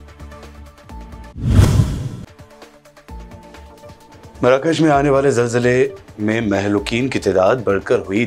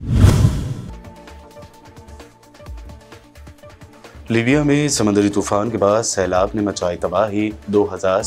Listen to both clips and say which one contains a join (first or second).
first